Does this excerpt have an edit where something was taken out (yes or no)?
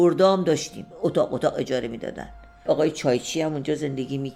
yes